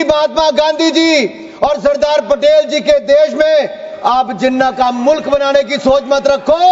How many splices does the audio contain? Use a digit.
0